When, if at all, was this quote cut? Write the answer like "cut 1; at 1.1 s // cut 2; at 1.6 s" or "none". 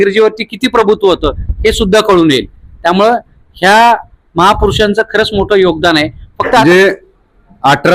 cut 1; at 6.6 s